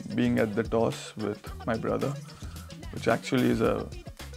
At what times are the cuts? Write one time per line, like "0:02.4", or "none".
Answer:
none